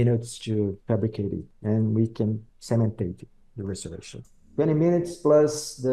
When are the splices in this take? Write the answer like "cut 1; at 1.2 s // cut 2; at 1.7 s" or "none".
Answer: cut 1; at 1.2 s // cut 2; at 2.5 s